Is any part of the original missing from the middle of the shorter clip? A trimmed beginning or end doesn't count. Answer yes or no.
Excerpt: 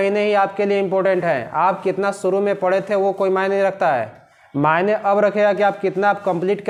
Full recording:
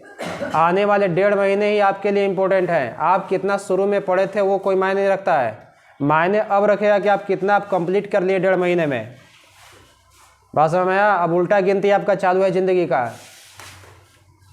no